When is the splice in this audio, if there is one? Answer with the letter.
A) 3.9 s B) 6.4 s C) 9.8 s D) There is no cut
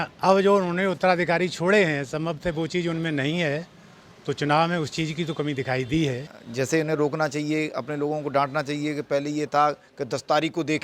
B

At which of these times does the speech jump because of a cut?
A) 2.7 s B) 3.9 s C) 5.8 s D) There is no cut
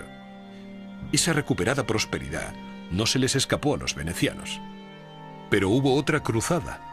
B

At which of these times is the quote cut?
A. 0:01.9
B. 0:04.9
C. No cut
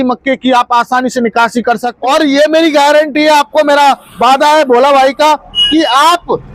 A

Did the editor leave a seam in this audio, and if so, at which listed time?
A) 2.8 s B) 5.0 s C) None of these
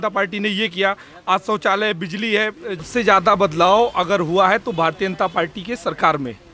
A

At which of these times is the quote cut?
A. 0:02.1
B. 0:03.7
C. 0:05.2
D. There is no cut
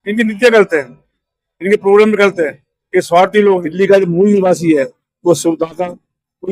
B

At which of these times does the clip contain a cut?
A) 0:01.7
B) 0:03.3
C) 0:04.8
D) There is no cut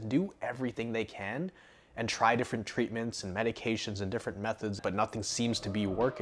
C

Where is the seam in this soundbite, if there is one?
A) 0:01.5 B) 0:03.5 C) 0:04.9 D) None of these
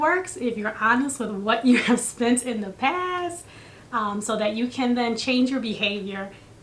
D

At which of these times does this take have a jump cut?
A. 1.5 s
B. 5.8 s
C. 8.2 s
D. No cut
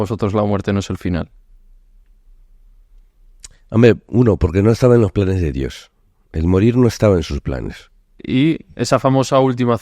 C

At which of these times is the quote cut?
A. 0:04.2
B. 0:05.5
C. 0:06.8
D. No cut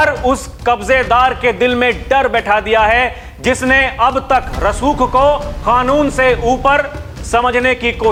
D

